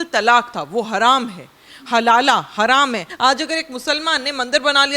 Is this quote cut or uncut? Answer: cut